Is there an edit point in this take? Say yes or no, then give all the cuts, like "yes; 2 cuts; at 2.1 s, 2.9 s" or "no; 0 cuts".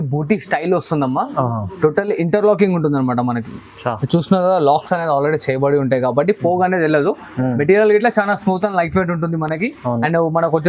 no; 0 cuts